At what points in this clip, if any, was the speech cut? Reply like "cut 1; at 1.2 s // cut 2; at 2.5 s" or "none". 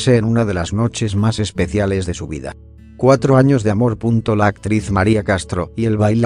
cut 1; at 3.8 s